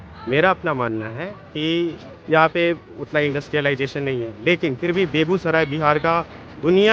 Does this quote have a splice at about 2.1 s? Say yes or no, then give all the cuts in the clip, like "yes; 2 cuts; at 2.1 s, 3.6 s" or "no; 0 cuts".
yes; 1 cut; at 2.1 s